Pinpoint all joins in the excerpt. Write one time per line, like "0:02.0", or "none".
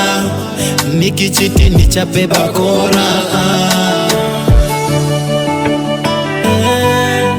none